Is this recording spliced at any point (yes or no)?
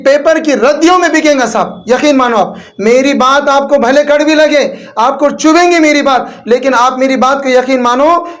no